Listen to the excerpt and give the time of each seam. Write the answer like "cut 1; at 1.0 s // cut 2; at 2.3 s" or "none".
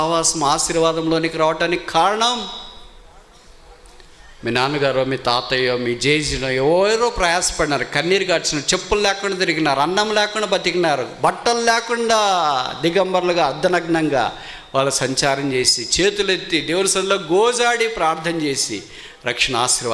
none